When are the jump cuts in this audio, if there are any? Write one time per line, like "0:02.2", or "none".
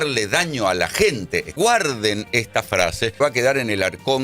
0:01.5
0:03.2